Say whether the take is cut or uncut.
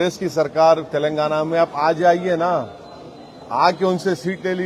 uncut